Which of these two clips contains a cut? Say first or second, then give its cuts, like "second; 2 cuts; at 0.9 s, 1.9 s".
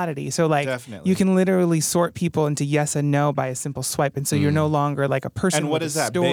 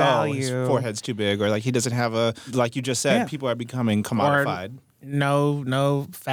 second; 1 cut; at 2.5 s